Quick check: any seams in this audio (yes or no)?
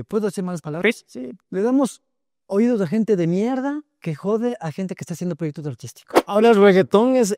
yes